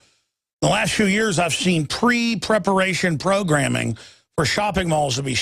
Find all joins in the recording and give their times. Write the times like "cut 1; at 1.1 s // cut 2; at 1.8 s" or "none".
cut 1; at 1.2 s